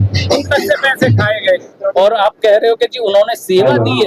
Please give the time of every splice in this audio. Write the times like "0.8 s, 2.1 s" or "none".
none